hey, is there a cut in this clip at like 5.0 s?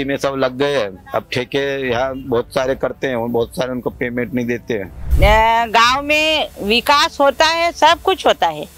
yes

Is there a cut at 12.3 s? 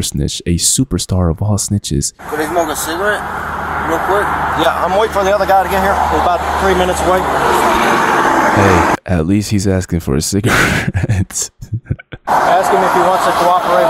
yes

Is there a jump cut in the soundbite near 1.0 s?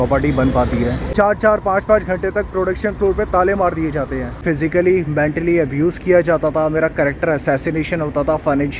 yes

